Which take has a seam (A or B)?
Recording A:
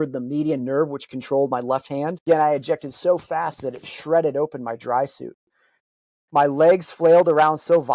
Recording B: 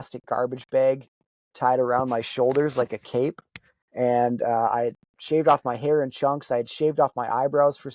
A